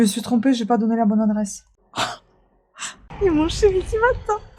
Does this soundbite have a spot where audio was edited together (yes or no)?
yes